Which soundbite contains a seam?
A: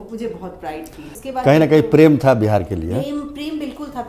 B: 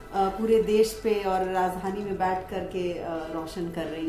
A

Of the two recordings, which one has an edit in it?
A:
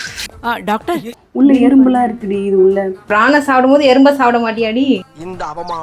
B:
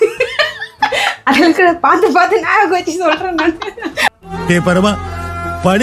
A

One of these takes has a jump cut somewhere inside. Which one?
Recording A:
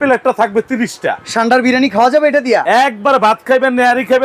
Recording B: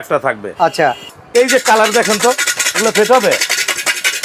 B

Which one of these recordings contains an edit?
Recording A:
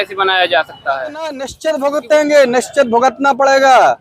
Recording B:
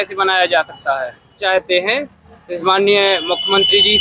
A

